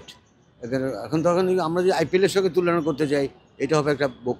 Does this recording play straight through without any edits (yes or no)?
yes